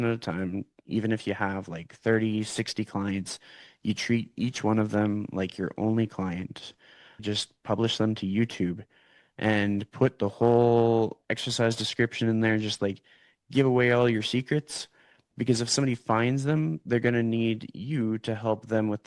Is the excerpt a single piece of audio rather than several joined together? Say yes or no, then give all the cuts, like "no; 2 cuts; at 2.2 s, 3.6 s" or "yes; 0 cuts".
no; 1 cut; at 7.2 s